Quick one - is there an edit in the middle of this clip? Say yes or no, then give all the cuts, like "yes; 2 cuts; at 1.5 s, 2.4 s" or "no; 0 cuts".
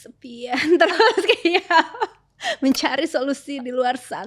no; 0 cuts